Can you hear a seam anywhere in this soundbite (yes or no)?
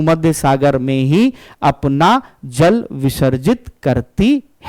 no